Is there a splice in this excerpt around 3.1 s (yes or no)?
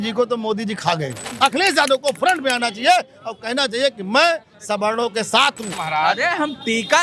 no